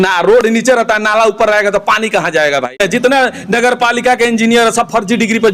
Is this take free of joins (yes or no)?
no